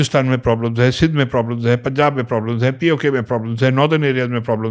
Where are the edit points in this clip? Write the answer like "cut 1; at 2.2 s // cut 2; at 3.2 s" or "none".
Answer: none